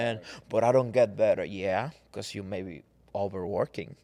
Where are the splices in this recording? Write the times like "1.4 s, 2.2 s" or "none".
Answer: none